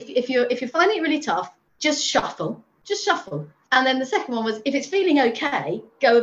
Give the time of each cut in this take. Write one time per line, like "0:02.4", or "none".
0:01.6
0:03.0